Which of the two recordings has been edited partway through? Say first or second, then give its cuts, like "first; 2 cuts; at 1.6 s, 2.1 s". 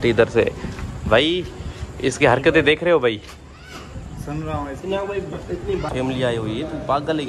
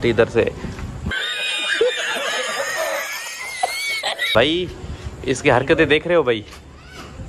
first; 2 cuts; at 1.0 s, 5.9 s